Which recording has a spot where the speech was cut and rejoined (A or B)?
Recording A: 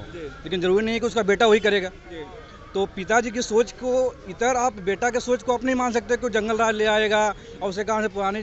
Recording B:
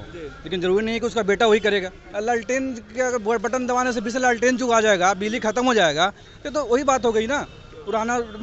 B